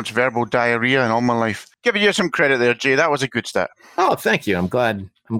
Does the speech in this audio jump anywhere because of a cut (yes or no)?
yes